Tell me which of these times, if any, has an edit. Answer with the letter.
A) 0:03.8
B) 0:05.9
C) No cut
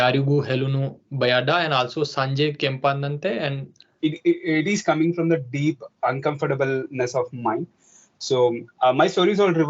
A